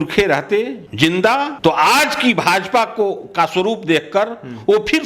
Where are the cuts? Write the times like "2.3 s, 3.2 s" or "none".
none